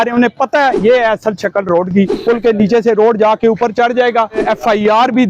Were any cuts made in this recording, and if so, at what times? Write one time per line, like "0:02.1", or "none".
0:00.8
0:02.2
0:04.4